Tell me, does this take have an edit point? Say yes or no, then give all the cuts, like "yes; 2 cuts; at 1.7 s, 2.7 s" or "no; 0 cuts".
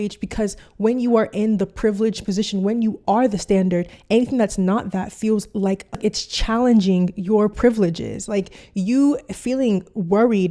no; 0 cuts